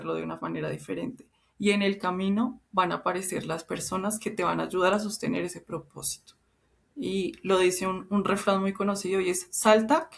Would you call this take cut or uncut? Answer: uncut